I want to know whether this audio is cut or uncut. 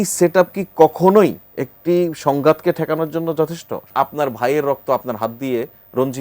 cut